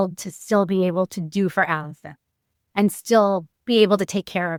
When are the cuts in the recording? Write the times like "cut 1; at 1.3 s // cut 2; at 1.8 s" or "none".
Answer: none